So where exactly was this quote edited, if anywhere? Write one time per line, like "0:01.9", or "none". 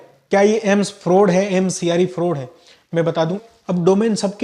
0:03.5